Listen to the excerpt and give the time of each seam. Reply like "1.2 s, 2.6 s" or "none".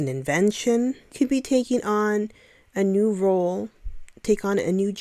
1.1 s